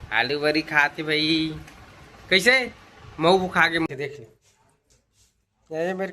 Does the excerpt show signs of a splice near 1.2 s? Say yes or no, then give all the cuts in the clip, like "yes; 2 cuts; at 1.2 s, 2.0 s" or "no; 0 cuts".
no; 1 cut; at 3.9 s